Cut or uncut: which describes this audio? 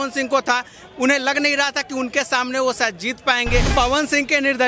cut